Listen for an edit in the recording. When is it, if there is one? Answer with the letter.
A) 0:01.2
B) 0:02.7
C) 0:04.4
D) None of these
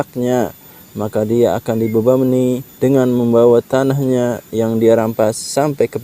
B